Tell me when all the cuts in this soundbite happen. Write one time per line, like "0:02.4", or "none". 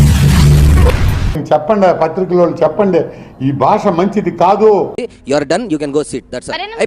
0:01.4
0:04.9